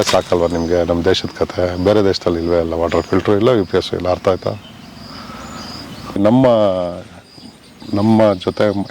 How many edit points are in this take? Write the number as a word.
one